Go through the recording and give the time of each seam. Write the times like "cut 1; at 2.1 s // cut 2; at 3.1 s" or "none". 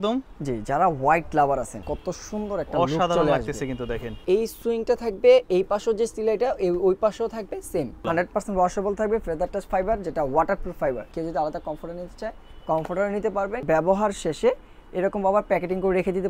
cut 1; at 1.8 s // cut 2; at 4.1 s // cut 3; at 8.0 s // cut 4; at 11.1 s // cut 5; at 13.6 s